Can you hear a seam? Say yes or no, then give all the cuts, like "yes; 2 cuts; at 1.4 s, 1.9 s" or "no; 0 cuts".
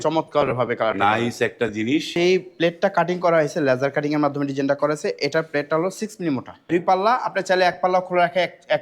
yes; 2 cuts; at 2.1 s, 6.7 s